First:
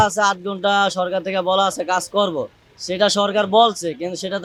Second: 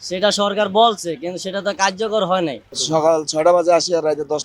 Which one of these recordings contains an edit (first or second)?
second